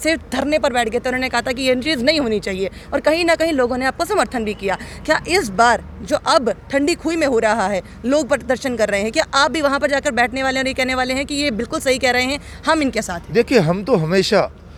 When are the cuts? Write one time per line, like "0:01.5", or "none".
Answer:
none